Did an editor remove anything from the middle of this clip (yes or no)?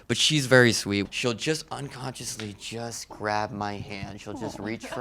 yes